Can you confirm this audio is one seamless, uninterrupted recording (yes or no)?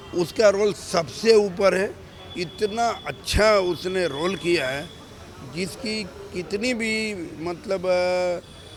yes